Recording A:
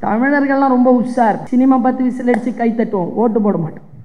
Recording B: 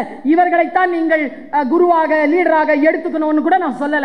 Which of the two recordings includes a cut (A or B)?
A